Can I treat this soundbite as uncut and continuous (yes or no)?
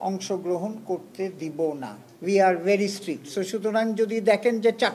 yes